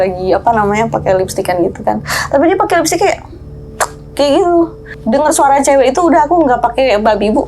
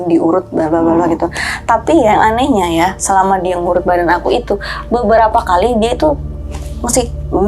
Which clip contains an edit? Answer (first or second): first